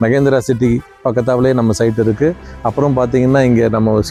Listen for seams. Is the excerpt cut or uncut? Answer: uncut